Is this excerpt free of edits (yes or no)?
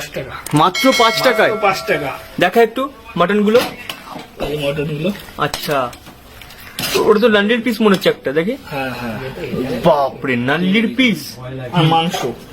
no